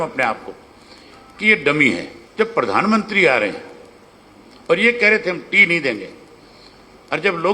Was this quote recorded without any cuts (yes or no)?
no